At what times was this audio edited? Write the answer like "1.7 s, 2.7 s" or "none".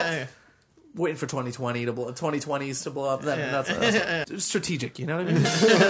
4.3 s